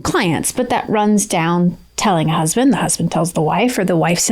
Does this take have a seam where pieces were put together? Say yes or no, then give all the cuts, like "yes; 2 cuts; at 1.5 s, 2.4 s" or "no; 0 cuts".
yes; 1 cut; at 1.9 s